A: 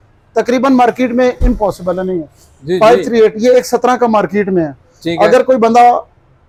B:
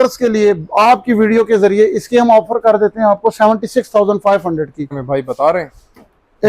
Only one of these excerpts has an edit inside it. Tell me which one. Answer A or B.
B